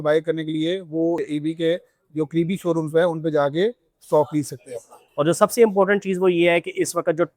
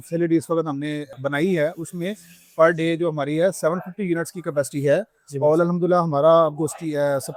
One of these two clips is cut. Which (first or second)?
first